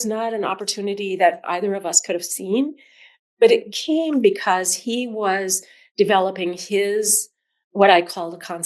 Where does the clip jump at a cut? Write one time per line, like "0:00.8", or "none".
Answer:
none